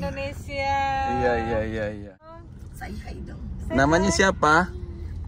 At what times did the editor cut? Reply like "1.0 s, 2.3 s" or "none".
2.3 s